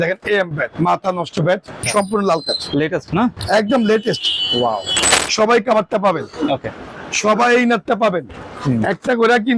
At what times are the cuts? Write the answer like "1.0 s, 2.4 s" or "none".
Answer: 1.8 s, 5.1 s